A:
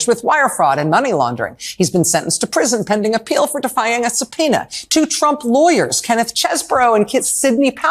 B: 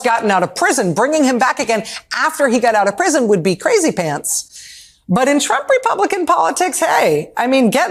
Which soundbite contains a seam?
A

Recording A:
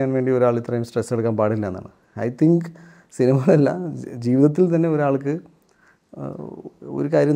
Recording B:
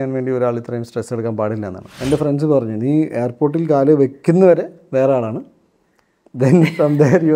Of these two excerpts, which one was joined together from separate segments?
B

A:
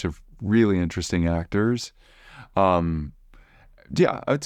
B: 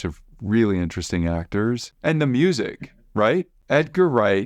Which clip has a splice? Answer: B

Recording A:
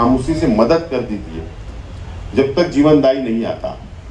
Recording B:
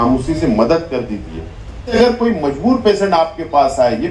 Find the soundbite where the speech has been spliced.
B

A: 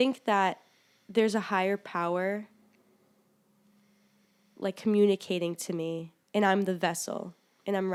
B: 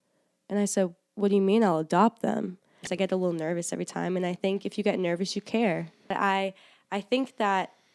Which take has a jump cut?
B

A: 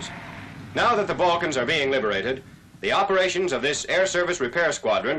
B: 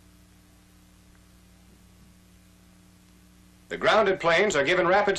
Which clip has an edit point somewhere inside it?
A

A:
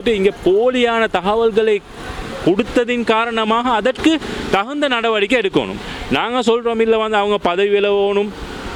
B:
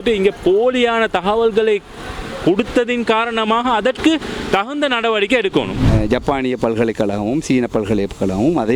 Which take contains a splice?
B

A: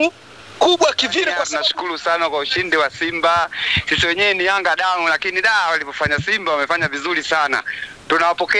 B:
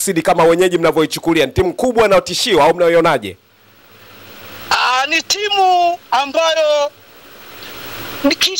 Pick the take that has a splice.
A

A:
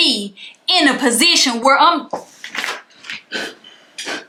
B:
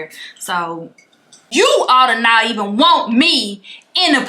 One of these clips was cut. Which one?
B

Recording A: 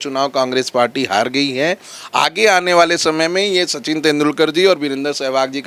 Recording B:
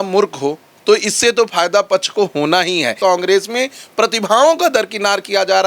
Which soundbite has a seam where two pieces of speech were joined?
B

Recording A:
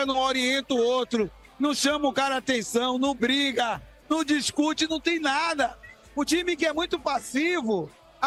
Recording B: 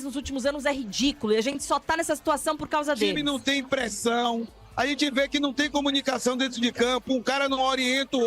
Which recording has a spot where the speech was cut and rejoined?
B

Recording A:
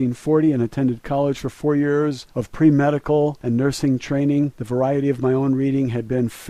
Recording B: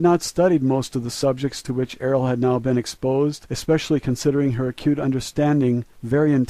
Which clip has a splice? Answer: B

